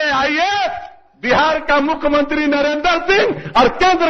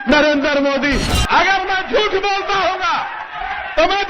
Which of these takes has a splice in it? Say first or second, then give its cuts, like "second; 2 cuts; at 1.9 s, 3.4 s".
second; 1 cut; at 1.1 s